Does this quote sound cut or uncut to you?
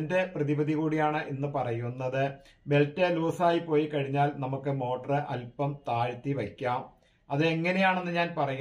uncut